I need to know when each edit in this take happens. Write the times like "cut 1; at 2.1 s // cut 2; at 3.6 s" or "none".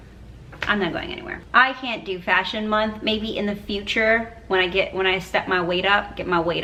none